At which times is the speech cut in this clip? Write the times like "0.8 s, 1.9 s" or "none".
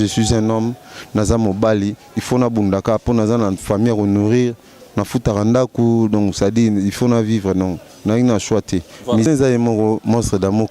9.3 s